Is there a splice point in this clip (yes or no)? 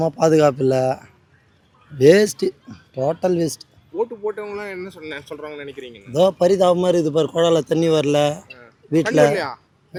no